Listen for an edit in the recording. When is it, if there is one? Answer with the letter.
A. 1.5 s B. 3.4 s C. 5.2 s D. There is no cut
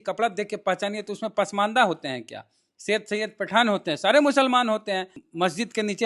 C